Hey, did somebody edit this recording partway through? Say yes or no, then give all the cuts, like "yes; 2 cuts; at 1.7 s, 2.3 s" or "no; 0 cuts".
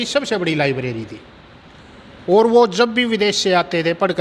no; 0 cuts